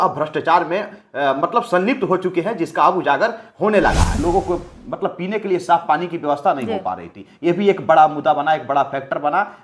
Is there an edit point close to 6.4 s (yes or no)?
no